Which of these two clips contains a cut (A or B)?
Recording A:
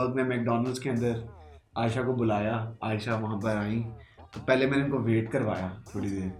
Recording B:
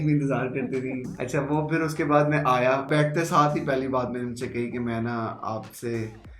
B